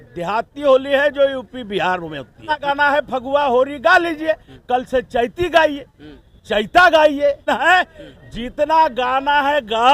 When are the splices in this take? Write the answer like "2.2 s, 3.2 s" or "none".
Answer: 2.6 s, 7.4 s